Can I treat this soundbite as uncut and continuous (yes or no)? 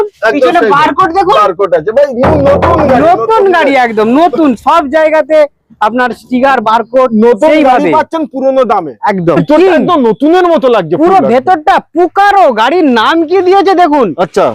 no